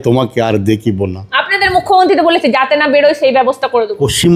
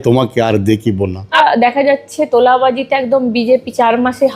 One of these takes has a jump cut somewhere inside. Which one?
second; 1 cut; at 1.4 s

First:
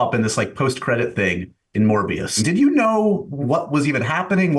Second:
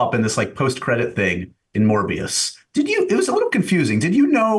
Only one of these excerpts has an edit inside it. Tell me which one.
first; 2 cuts; at 2.4 s, 3.4 s

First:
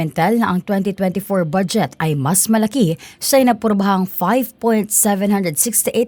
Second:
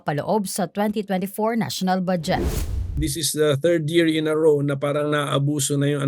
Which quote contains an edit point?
second; 1 cut; at 2.5 s

